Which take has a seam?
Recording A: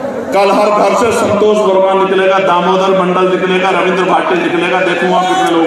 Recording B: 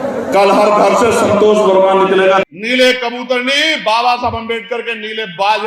B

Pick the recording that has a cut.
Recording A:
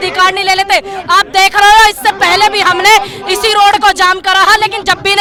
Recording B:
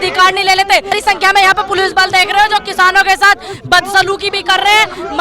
B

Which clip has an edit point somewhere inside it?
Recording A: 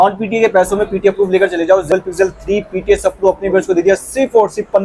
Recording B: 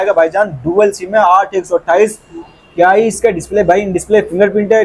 A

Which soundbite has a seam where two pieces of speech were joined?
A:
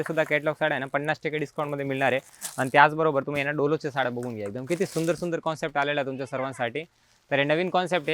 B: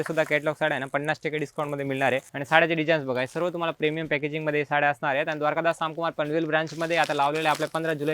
B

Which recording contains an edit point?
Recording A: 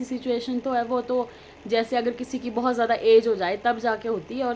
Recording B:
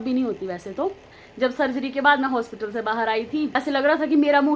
B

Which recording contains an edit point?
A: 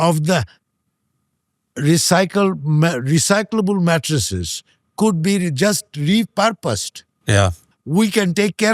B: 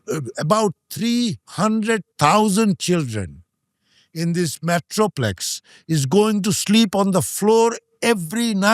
A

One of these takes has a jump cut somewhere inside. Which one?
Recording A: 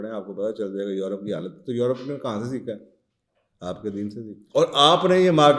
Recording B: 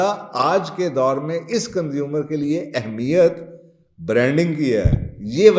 A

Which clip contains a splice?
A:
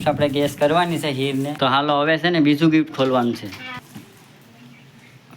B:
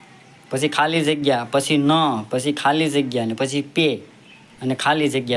A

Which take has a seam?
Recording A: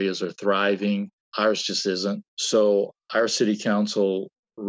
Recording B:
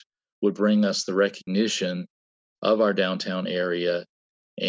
A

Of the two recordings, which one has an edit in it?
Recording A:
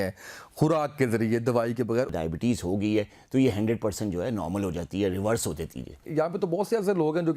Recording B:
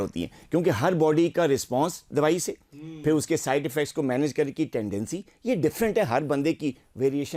A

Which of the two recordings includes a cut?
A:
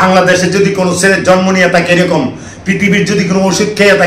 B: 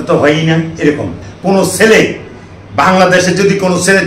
B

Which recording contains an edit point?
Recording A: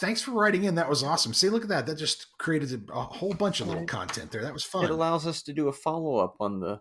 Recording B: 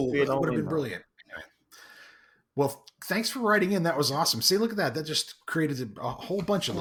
A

